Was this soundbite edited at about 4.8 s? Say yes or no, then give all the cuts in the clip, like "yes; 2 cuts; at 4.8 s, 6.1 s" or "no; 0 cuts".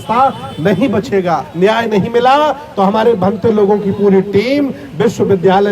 no; 1 cut; at 1.5 s